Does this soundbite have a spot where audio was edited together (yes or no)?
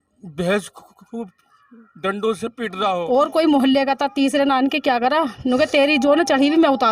yes